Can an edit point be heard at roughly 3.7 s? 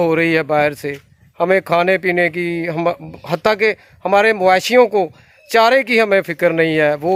no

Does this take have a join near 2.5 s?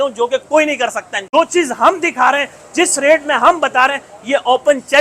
no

